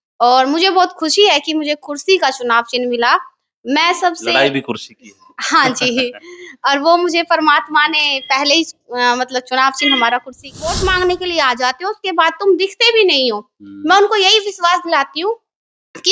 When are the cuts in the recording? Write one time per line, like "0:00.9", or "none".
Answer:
0:10.7

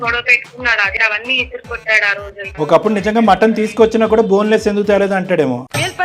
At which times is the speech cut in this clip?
0:00.9
0:02.5

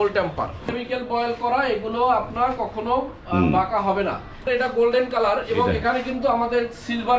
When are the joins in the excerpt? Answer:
0:00.7
0:04.5

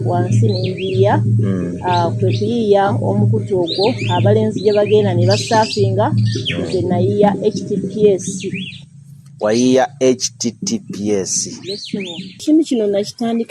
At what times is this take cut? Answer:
0:12.4

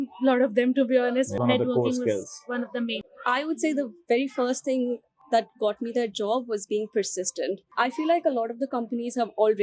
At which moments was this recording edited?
0:01.3
0:03.1
0:07.6

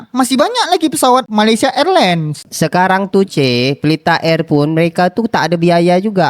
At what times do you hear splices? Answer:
0:01.3
0:02.4

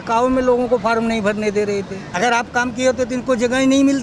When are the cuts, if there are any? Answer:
0:02.0

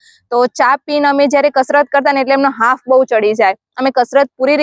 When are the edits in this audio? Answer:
none

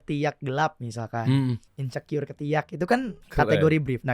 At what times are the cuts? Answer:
0:01.7
0:03.2

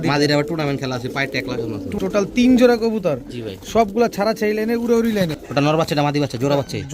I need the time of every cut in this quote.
0:01.9
0:05.4

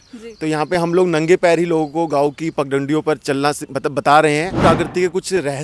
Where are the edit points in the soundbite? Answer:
0:04.6

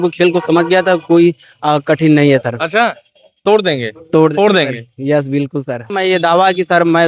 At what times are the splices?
0:05.9

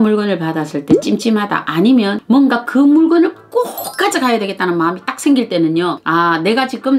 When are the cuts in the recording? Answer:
0:02.2
0:06.0

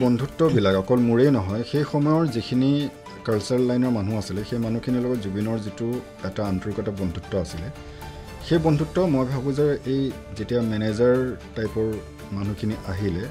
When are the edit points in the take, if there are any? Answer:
none

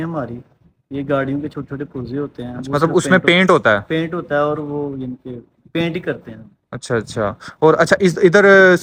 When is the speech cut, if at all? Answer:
none

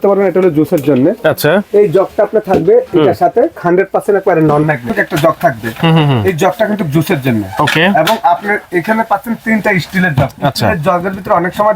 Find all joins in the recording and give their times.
0:03.6
0:04.9

